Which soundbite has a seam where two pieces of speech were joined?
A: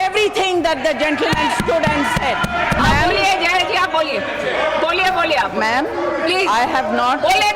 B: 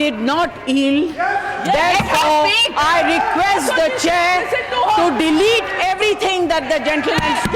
A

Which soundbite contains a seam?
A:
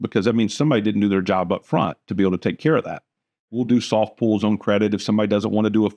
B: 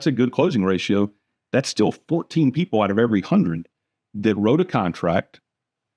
A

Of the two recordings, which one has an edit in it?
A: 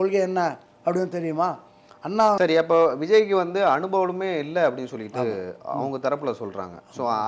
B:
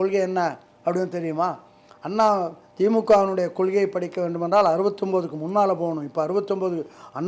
A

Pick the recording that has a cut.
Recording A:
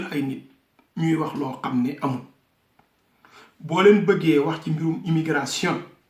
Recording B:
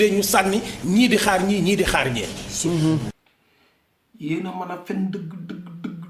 B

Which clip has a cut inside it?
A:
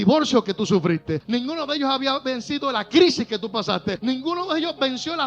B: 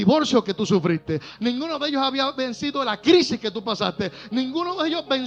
A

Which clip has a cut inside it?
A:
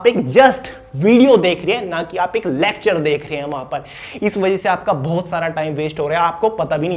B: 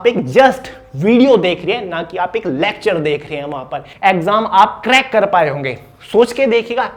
B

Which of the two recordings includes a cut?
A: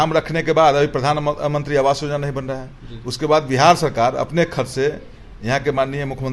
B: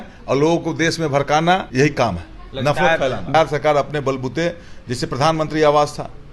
B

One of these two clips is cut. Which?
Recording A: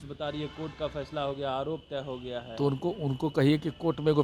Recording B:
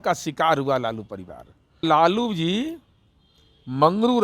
B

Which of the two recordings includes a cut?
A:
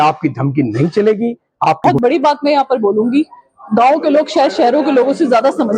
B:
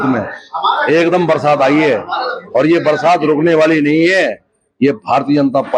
A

